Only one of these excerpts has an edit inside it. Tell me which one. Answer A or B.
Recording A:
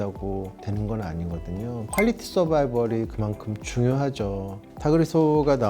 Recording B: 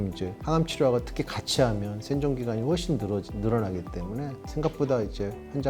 A